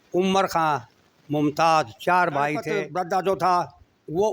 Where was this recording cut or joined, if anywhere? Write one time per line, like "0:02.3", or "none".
0:02.8